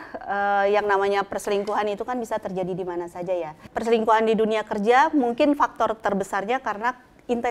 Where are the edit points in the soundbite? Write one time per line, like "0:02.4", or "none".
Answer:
0:03.6